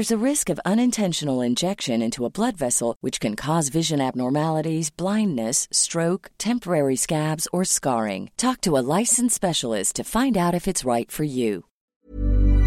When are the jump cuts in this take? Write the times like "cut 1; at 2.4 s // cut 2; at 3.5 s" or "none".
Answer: cut 1; at 11.8 s